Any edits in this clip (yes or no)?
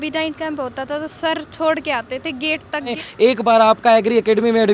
yes